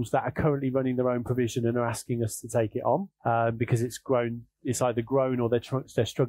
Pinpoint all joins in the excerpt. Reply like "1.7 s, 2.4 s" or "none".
3.1 s

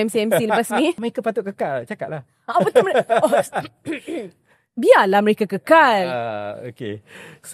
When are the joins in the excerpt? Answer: 1.1 s

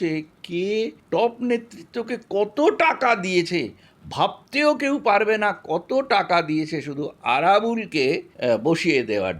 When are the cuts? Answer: 1.0 s, 8.3 s

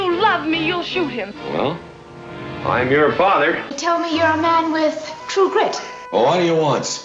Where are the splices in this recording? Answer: 3.8 s

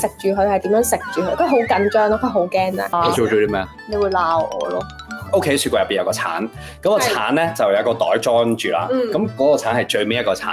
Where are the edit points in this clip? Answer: 2.8 s, 5.2 s

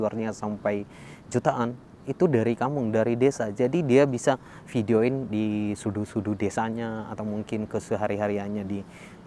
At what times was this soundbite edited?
none

